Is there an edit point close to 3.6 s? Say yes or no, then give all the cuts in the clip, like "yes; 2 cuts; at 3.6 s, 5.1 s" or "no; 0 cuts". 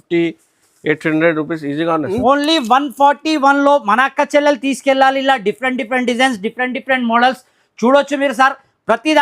no; 1 cut; at 2.1 s